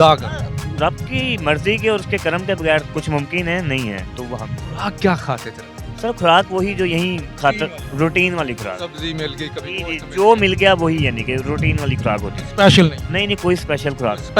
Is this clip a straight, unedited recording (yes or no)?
yes